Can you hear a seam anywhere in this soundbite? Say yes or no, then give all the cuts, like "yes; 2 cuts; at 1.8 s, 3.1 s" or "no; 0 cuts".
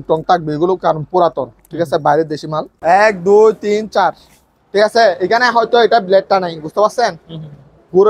yes; 1 cut; at 2.7 s